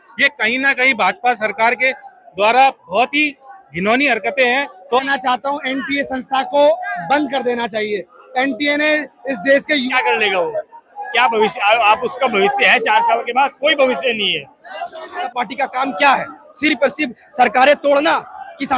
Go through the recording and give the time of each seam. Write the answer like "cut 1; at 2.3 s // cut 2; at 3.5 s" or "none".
cut 1; at 5.0 s // cut 2; at 9.9 s // cut 3; at 15.3 s